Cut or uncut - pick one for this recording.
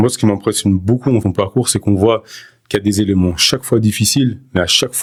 uncut